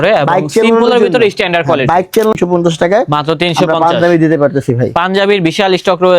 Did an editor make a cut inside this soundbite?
yes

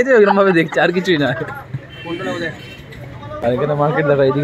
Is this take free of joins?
no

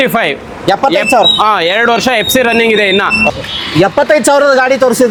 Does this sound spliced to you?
no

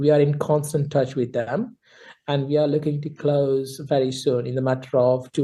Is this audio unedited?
yes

